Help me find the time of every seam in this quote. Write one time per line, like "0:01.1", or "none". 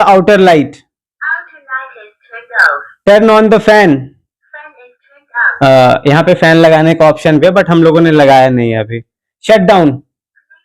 none

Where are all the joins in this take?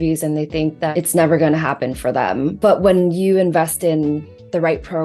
0:00.9
0:02.6

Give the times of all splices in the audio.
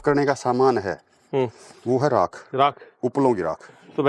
none

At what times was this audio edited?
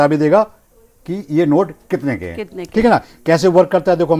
none

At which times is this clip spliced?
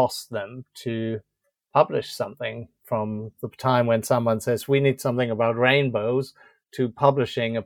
none

